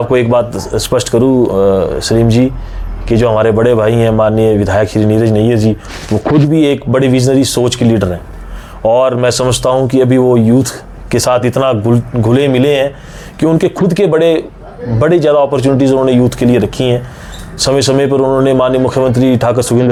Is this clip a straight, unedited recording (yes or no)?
yes